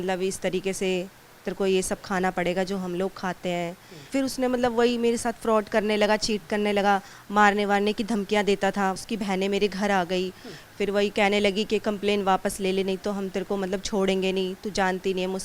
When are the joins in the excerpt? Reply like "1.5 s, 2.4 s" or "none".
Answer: 4.1 s, 7.2 s, 9.0 s